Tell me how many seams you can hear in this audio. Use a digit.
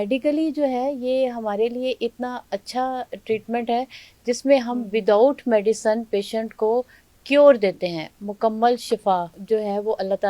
0